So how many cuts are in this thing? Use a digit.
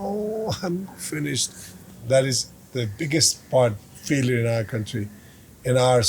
1